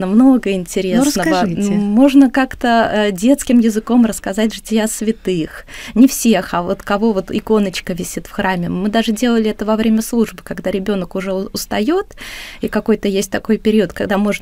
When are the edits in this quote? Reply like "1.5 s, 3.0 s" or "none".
none